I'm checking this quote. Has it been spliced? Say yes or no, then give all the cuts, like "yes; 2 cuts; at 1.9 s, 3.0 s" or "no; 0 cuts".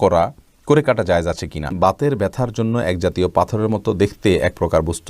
yes; 1 cut; at 1.7 s